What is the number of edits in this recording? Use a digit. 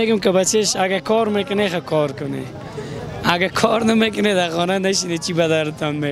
0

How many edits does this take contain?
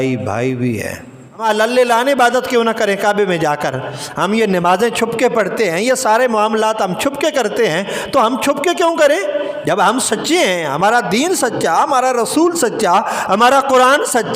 1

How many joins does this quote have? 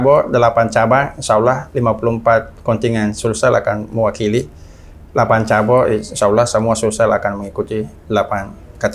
0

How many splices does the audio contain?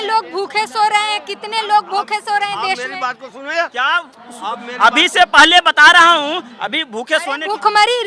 0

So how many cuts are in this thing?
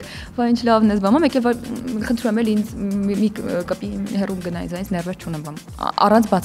0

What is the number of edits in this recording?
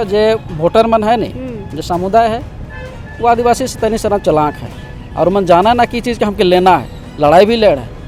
0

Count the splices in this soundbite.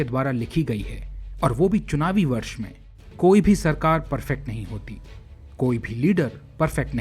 1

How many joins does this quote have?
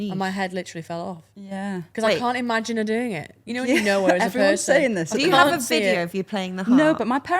0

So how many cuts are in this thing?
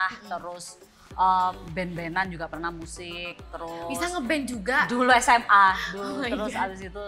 0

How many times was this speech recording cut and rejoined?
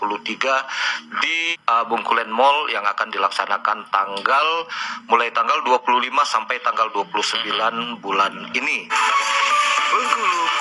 2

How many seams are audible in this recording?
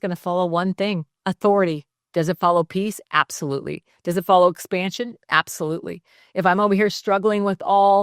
2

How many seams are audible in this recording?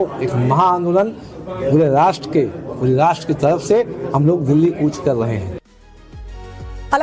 1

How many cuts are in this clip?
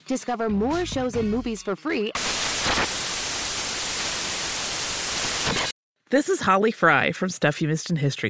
1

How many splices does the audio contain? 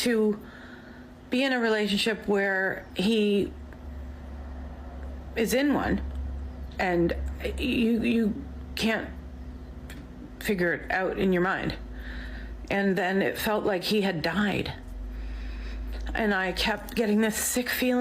1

